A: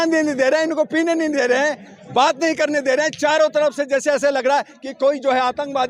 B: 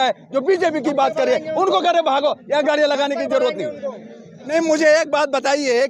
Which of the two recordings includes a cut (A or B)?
B